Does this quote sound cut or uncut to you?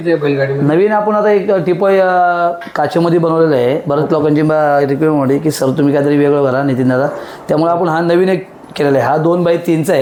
uncut